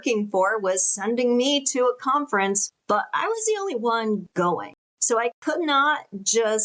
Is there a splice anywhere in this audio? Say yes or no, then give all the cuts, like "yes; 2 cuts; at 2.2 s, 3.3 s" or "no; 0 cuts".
yes; 2 cuts; at 2.7 s, 4.4 s